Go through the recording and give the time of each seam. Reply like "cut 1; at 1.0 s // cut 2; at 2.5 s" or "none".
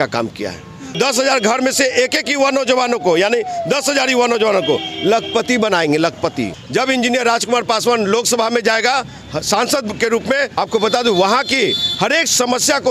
cut 1; at 1.0 s // cut 2; at 6.5 s // cut 3; at 10.5 s